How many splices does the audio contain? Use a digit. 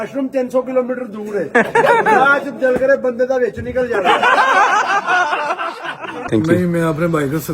2